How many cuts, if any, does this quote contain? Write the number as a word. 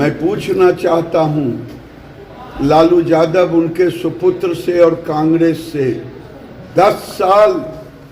one